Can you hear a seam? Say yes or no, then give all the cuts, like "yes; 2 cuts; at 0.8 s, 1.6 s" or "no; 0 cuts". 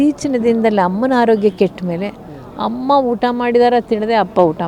no; 0 cuts